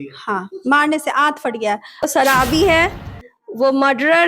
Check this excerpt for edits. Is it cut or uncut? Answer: cut